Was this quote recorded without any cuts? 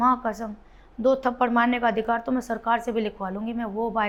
yes; 0 cuts

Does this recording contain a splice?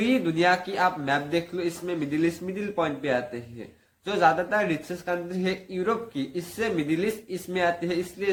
no; 0 cuts

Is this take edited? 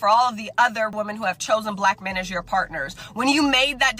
yes; 1 cut; at 0.9 s

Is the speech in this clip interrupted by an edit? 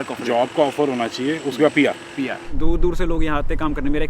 yes; 1 cut; at 2.5 s

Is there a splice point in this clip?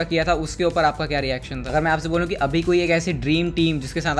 yes; 1 cut; at 1.7 s

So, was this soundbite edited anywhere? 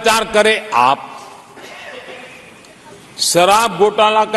no; 0 cuts

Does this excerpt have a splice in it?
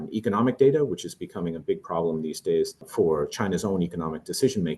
yes; 1 cut; at 2.9 s

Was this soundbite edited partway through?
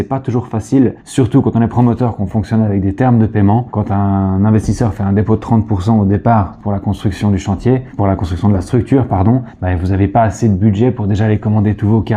no; 0 cuts

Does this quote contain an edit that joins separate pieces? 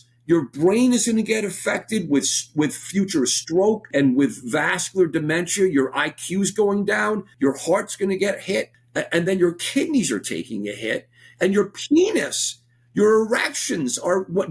yes; 3 cuts; at 3.9 s, 7.3 s, 8.8 s

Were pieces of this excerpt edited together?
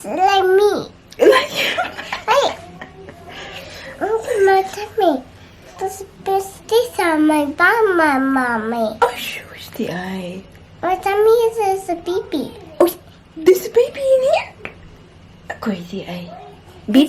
no; 0 cuts

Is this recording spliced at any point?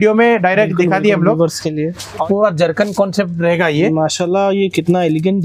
yes; 1 cut; at 2.2 s

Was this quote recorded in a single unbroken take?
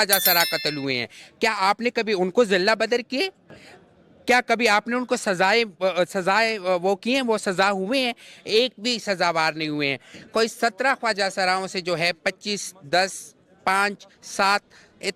yes; 0 cuts

